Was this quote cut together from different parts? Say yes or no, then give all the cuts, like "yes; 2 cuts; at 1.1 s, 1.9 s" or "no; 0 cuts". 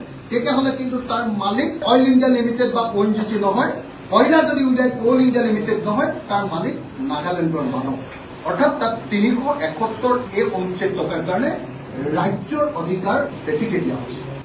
yes; 2 cuts; at 10.3 s, 13.3 s